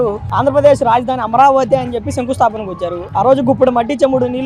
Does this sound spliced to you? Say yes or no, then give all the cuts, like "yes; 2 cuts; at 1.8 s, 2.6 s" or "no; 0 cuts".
no; 0 cuts